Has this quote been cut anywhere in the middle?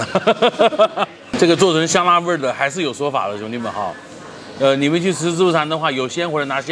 yes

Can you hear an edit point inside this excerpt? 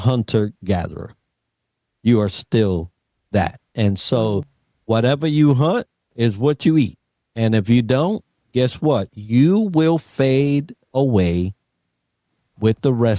no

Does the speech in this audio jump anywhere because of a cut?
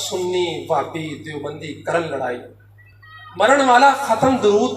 no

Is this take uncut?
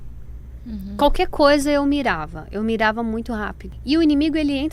no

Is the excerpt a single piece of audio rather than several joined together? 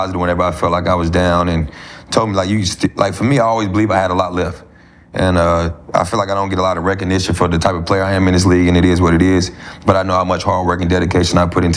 yes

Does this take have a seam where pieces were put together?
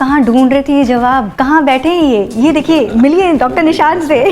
yes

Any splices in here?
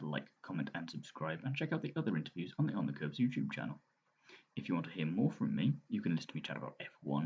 no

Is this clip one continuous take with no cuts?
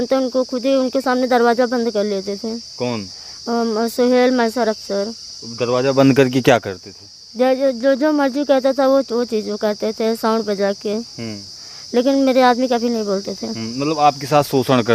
yes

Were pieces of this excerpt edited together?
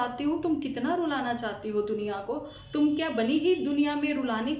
no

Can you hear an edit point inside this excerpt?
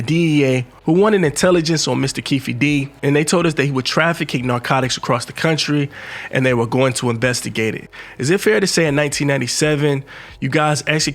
yes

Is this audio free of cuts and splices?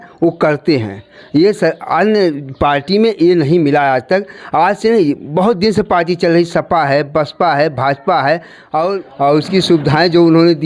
no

